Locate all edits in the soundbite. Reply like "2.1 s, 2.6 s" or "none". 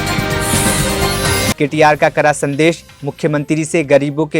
1.5 s